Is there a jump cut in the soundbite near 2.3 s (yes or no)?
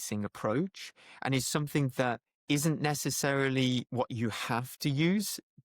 yes